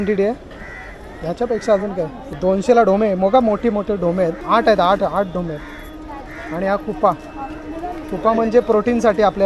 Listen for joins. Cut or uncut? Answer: cut